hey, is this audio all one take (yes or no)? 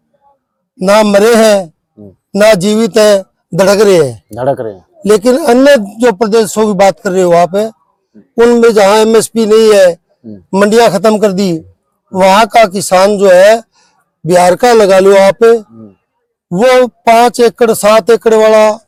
yes